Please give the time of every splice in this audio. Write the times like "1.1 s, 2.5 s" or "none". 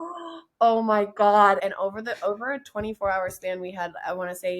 1.6 s